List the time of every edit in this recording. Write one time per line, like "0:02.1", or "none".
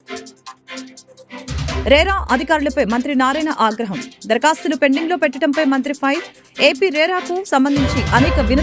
0:01.8